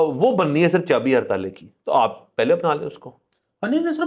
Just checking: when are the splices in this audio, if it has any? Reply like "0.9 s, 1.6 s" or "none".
none